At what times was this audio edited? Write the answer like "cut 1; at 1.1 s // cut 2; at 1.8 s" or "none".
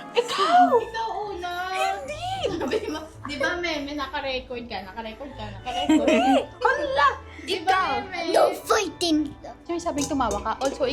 cut 1; at 9.6 s

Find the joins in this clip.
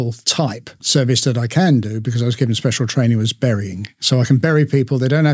cut 1; at 0.8 s // cut 2; at 4.0 s

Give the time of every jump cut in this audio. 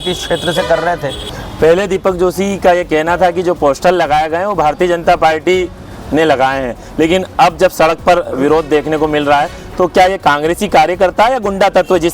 cut 1; at 1.3 s

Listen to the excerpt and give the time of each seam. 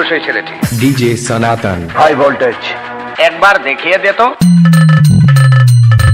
none

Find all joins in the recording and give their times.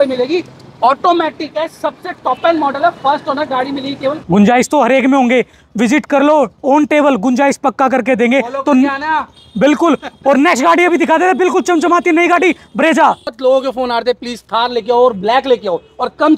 cut 1; at 4.2 s // cut 2; at 13.3 s

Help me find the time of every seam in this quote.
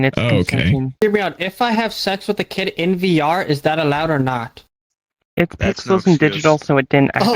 cut 1; at 0.9 s

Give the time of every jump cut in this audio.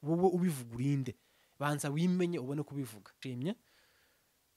cut 1; at 3.1 s

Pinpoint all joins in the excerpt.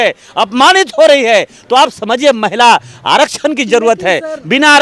none

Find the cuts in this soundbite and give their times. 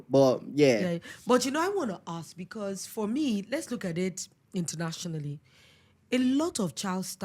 none

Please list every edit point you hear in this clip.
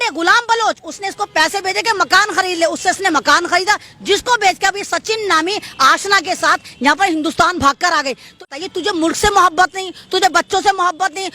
cut 1; at 8.5 s

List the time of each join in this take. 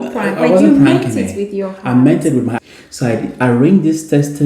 cut 1; at 2.5 s

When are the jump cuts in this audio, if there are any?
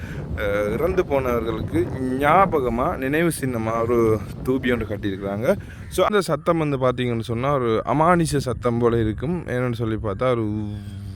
cut 1; at 6.1 s

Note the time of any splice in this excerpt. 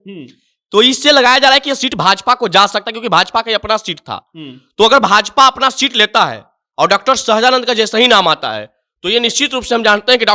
none

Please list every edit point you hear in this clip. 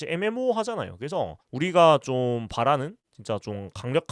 cut 1; at 1.4 s

